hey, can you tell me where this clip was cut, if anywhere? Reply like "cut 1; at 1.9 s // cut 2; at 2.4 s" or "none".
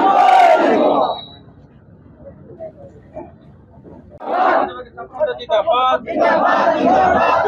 cut 1; at 4.2 s

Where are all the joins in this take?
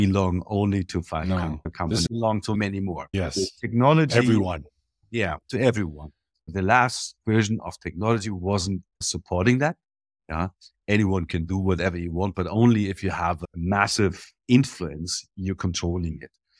cut 1; at 2.1 s // cut 2; at 3.1 s

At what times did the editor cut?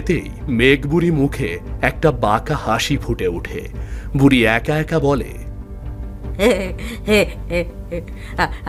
none

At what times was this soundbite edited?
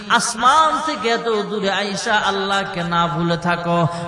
none

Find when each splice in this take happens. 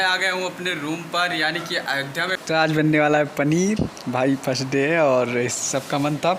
cut 1; at 2.4 s

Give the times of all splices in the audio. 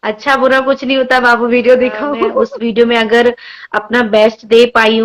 cut 1; at 2.3 s

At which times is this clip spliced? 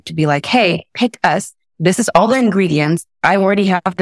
cut 1; at 3.1 s

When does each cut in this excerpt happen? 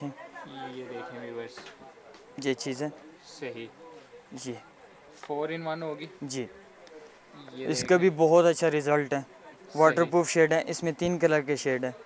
none

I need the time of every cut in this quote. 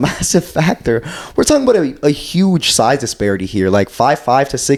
none

